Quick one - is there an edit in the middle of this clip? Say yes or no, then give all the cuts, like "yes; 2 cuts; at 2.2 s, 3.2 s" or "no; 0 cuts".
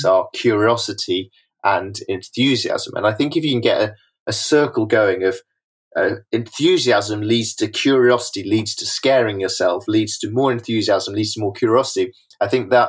no; 0 cuts